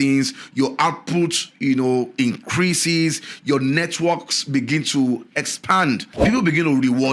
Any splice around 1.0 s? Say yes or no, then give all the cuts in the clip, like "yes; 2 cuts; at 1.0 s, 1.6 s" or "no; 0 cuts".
no; 1 cut; at 6.1 s